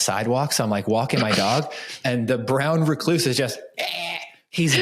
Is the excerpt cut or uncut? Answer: uncut